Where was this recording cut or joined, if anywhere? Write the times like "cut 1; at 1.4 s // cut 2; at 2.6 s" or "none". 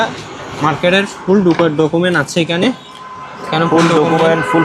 none